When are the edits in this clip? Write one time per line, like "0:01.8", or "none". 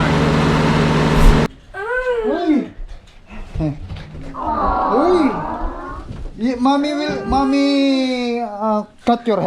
0:01.5